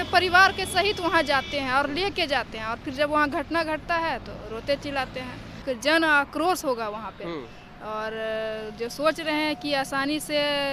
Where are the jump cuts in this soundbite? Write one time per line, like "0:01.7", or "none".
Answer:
0:05.6